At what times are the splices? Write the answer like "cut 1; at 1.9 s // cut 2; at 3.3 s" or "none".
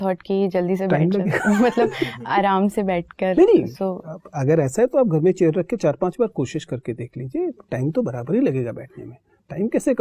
none